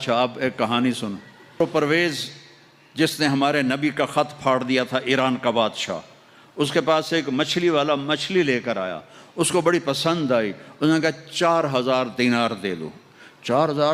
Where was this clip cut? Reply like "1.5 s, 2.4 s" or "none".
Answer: 1.6 s